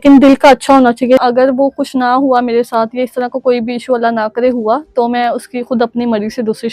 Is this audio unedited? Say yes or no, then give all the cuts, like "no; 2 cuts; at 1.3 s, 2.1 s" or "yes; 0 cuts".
no; 1 cut; at 1.2 s